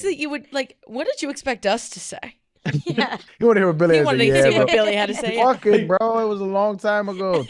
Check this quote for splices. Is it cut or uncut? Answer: cut